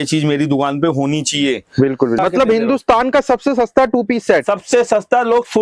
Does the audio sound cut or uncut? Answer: cut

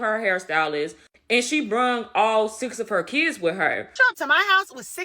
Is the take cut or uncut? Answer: cut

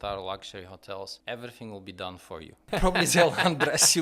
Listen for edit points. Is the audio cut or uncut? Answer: cut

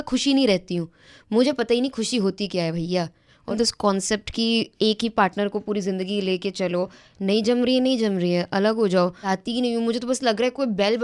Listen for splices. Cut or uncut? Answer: cut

